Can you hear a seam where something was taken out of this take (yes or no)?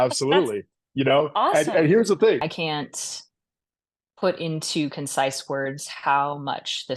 yes